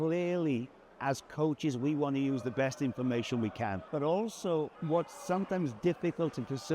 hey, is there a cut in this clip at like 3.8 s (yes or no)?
yes